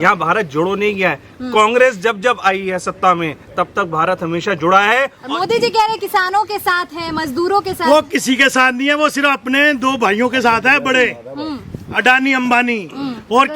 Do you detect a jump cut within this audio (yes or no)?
yes